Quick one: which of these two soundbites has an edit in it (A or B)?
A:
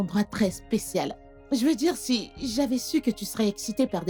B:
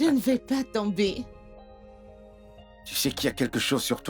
B